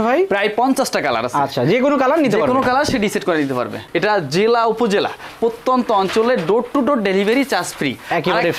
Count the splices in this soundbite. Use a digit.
1